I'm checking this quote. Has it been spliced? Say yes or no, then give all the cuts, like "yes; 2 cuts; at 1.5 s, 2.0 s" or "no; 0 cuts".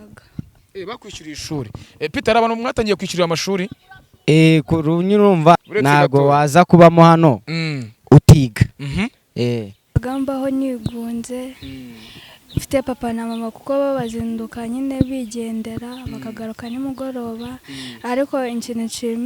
yes; 2 cuts; at 5.6 s, 9.9 s